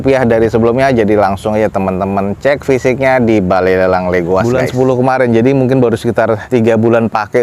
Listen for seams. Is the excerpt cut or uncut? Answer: cut